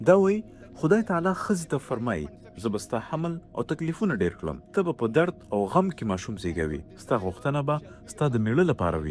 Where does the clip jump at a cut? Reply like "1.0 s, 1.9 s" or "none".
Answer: none